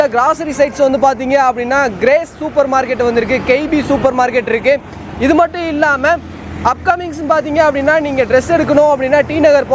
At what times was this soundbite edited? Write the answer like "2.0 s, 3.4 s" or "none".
none